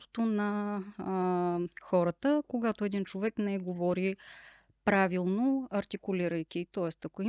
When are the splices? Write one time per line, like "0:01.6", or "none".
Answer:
none